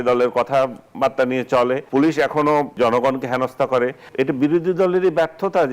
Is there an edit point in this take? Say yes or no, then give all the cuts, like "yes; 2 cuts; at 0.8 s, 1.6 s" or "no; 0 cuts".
yes; 3 cuts; at 1.8 s, 2.7 s, 4.1 s